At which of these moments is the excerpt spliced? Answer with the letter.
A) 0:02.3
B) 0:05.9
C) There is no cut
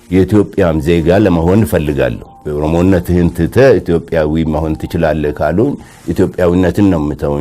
A